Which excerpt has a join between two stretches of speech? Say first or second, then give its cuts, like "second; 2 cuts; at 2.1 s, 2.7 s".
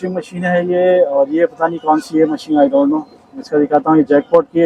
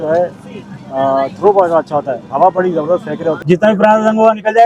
second; 1 cut; at 3.4 s